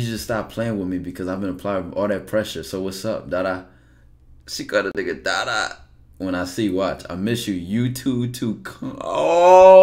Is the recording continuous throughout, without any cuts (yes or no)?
yes